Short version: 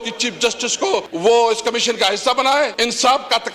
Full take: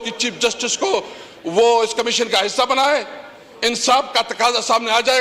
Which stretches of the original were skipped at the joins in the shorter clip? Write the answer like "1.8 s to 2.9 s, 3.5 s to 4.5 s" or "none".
1.1 s to 1.4 s, 3.1 s to 3.6 s